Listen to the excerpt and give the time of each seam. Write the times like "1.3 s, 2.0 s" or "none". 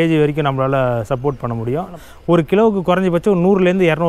2.5 s